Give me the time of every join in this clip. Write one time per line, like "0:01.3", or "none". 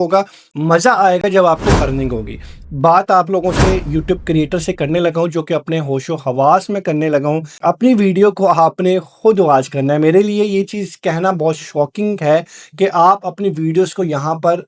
0:02.5

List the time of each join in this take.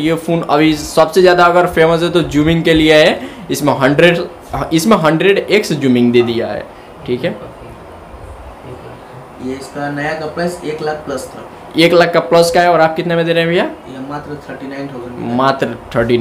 none

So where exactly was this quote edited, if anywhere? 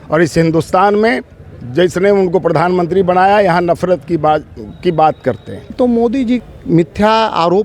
0:05.7
0:06.5

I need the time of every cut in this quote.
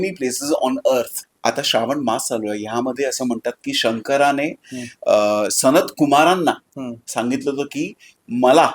0:01.2

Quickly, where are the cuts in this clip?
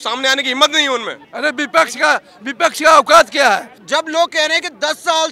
0:01.2
0:03.7

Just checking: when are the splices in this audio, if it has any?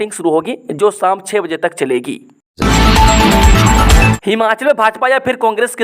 0:02.4
0:04.3

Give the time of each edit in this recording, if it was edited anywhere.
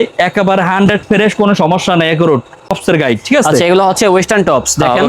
0:02.8

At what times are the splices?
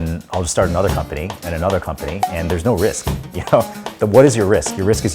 0:02.2

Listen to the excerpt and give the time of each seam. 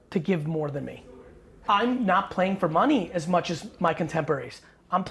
0:01.6

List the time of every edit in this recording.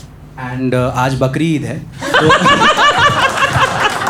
none

